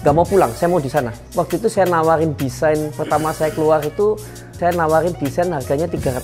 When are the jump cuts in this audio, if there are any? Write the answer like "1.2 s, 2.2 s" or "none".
1.2 s, 4.6 s